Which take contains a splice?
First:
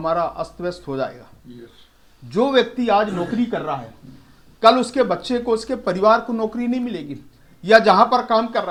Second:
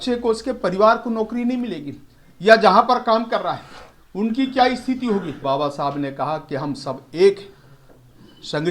second; 1 cut; at 5.3 s

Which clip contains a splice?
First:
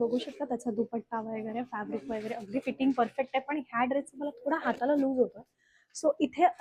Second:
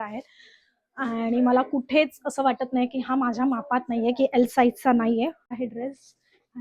second; 1 cut; at 5.6 s

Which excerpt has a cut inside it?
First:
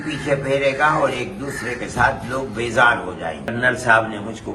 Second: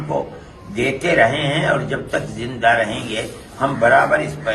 first; 1 cut; at 3.5 s

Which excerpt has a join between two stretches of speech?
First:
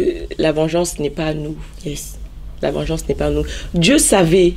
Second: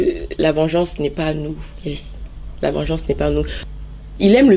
second; 1 cut; at 3.6 s

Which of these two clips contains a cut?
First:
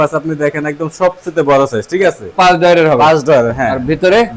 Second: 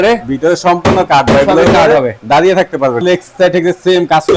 second; 1 cut; at 3.0 s

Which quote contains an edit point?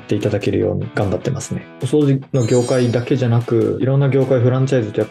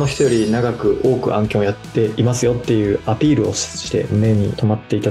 first; 1 cut; at 1.6 s

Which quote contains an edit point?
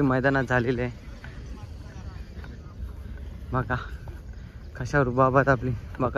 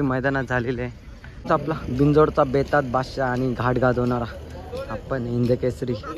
second; 1 cut; at 1.4 s

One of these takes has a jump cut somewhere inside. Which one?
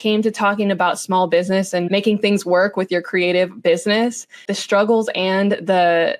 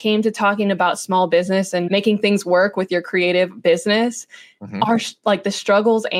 first; 1 cut; at 4.5 s

